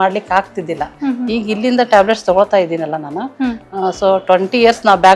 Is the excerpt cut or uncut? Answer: uncut